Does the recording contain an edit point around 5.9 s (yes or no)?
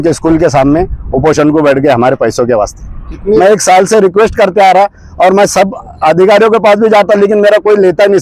no